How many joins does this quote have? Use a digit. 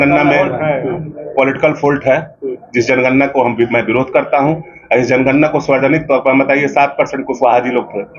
0